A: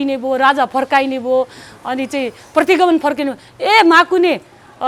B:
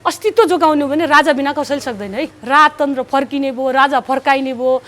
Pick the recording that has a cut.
B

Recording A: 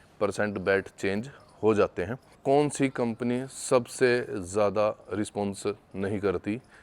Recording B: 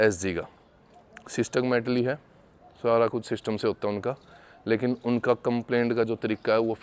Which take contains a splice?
A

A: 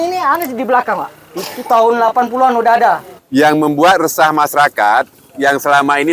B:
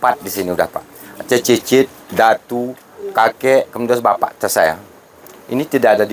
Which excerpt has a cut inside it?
A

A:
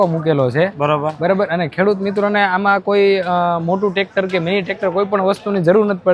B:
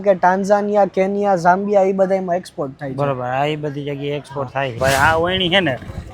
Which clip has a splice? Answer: B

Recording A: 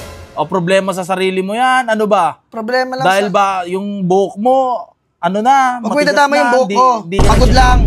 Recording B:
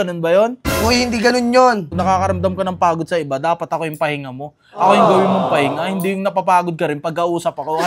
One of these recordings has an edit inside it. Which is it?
B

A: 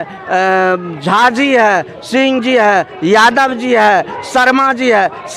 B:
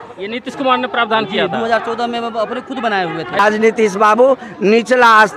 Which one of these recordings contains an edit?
B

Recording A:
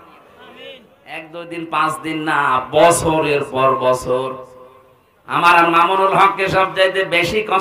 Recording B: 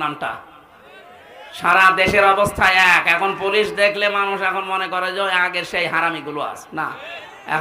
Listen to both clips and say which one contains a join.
A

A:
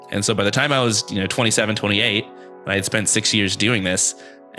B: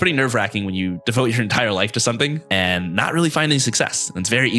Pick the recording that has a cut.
B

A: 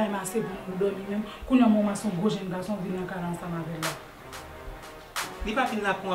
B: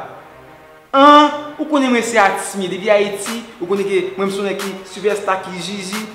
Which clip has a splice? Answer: A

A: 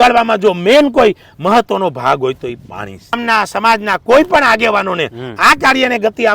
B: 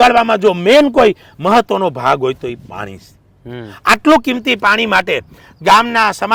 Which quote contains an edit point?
A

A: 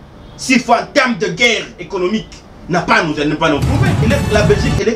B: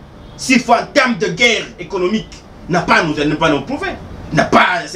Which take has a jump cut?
A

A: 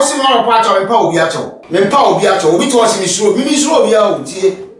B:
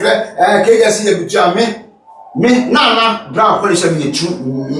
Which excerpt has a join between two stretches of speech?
A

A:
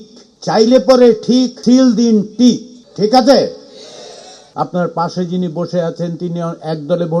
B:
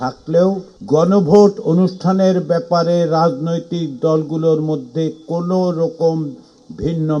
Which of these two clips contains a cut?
A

